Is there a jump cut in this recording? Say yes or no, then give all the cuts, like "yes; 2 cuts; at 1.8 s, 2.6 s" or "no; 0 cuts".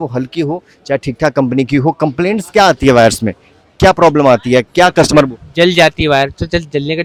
no; 0 cuts